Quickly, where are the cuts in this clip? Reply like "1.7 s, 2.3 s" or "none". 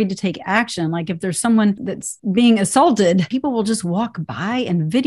1.9 s, 3.3 s